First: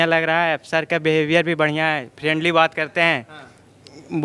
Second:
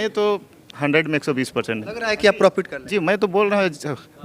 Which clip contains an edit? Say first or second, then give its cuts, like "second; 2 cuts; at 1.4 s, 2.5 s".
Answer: second; 1 cut; at 1.9 s